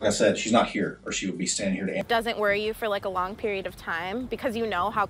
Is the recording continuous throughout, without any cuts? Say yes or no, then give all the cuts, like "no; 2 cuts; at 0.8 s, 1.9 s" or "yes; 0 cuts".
no; 1 cut; at 2.0 s